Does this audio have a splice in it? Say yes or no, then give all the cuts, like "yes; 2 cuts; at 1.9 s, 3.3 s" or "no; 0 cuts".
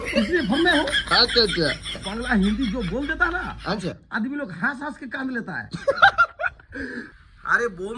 yes; 2 cuts; at 1.9 s, 7.0 s